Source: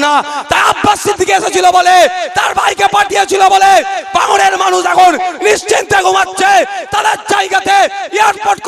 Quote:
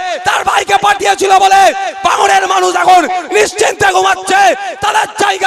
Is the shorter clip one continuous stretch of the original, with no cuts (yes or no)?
yes